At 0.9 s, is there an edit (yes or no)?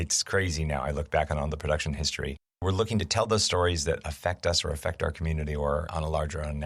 no